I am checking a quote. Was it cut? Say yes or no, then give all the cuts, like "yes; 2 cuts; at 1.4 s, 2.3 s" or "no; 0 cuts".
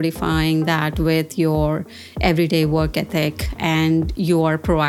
no; 0 cuts